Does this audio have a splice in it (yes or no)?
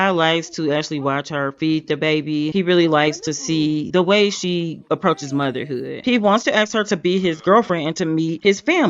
yes